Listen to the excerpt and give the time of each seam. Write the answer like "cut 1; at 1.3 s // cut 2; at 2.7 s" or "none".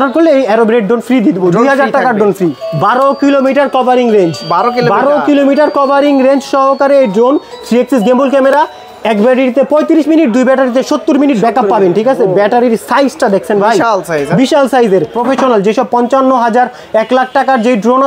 cut 1; at 2.6 s // cut 2; at 15.2 s